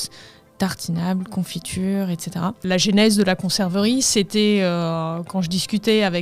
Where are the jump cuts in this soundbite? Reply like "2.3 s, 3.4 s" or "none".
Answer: 2.6 s